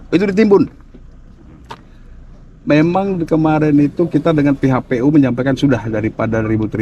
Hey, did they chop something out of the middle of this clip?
no; 0 cuts

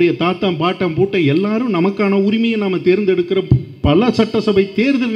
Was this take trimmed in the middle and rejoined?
no; 0 cuts

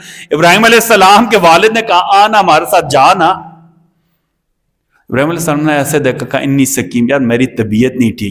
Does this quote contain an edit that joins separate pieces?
no; 0 cuts

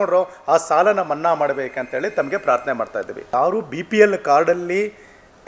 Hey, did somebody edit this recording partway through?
yes; 1 cut; at 3.2 s

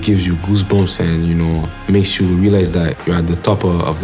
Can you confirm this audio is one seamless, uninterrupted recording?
no; 1 cut; at 1.7 s

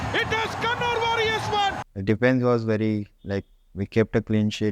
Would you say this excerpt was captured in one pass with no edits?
no; 1 cut; at 1.9 s

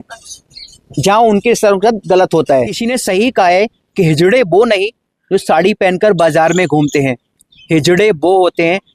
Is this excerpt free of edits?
no; 1 cut; at 2.8 s

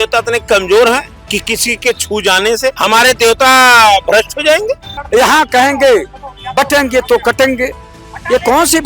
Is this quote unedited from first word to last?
no; 3 cuts; at 1.2 s, 2.8 s, 4.9 s

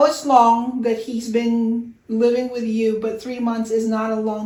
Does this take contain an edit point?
no; 0 cuts

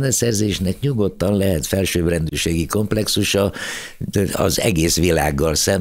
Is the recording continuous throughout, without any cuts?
yes; 0 cuts

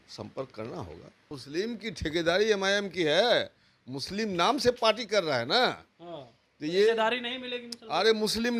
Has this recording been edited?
yes; 1 cut; at 1.4 s

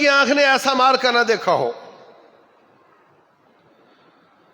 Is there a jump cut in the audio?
no; 0 cuts

